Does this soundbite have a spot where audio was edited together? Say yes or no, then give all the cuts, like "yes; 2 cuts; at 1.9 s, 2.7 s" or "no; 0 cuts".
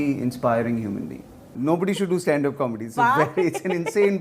yes; 1 cut; at 1.5 s